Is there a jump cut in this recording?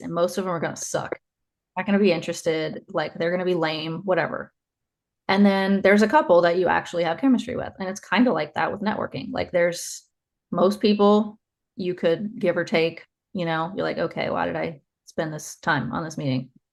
no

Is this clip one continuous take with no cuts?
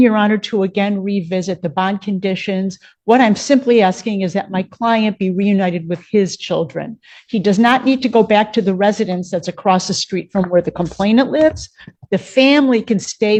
yes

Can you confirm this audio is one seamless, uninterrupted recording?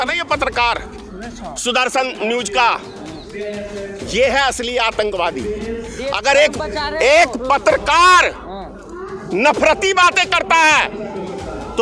yes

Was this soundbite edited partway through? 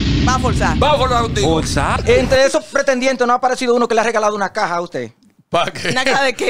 yes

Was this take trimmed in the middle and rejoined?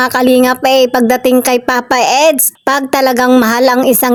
no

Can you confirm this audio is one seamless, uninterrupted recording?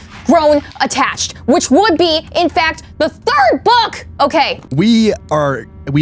no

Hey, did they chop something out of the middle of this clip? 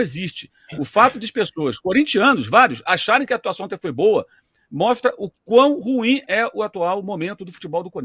no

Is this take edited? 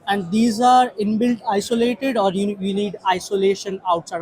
no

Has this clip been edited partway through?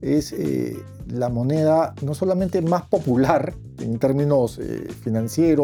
no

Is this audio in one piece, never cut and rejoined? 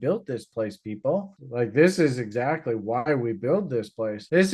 yes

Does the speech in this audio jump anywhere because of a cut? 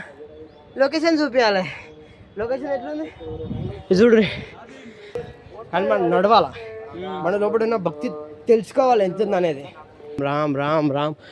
yes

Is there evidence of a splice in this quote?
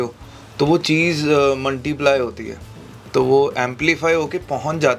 no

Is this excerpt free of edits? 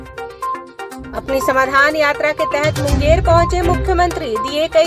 no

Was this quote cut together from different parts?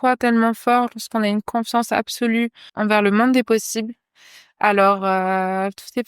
yes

